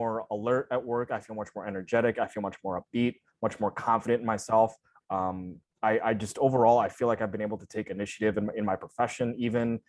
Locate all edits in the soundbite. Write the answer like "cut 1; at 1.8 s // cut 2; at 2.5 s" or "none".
none